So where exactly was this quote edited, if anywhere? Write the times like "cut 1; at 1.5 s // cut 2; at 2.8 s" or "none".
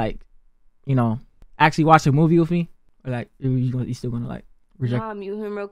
none

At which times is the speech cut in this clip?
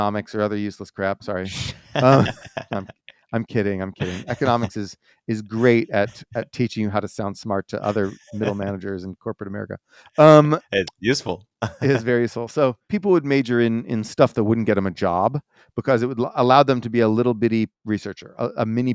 cut 1; at 12.9 s // cut 2; at 17.8 s

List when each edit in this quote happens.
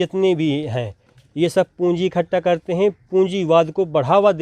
none

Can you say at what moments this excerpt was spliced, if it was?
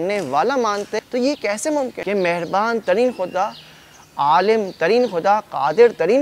cut 1; at 1.0 s // cut 2; at 2.0 s

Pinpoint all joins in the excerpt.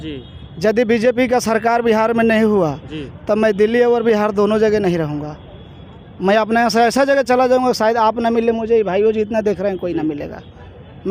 none

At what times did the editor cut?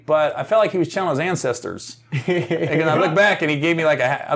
none

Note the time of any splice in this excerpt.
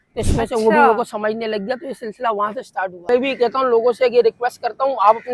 cut 1; at 3.1 s

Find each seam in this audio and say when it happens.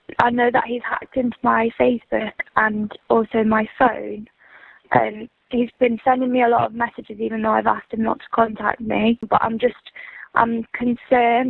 cut 1; at 9.2 s

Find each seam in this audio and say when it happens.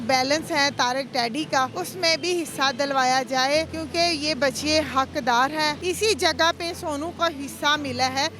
cut 1; at 1.8 s // cut 2; at 3.8 s // cut 3; at 5.8 s

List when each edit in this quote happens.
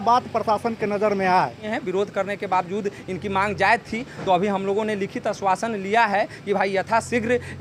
cut 1; at 1.6 s

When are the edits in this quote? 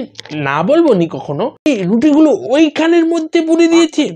cut 1; at 1.7 s

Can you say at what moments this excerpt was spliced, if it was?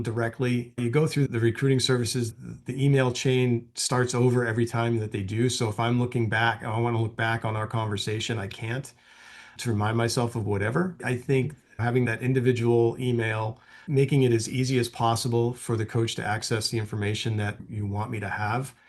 cut 1; at 2.4 s // cut 2; at 13.8 s

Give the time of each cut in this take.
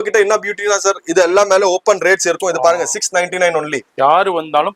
cut 1; at 3.8 s

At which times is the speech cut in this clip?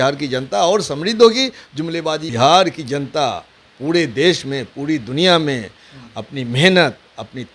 cut 1; at 2.2 s

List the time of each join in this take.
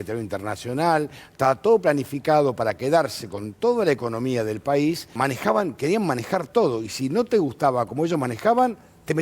cut 1; at 5.1 s

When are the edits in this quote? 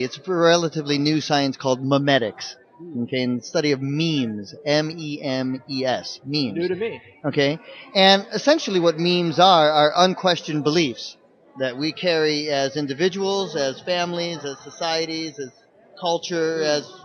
cut 1; at 15.6 s

